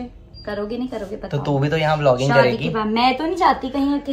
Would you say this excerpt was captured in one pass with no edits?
yes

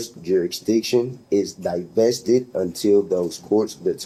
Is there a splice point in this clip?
no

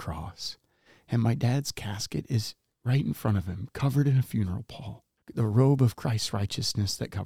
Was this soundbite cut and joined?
yes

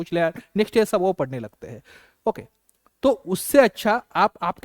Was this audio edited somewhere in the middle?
no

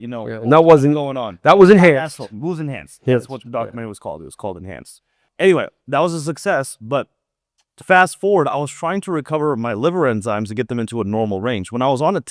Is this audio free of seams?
yes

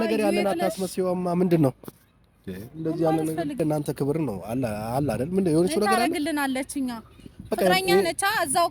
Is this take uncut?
no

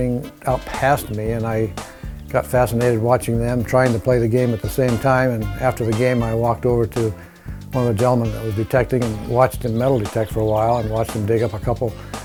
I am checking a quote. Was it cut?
no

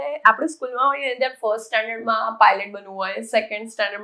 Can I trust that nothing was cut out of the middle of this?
yes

